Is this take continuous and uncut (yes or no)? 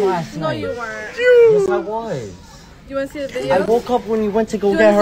yes